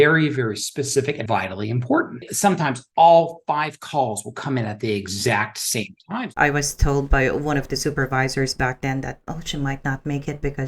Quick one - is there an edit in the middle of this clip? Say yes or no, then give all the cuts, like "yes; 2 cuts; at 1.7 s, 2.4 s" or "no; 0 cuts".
yes; 3 cuts; at 1.2 s, 2.2 s, 6.1 s